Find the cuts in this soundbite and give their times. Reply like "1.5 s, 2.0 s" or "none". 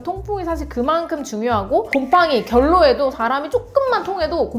none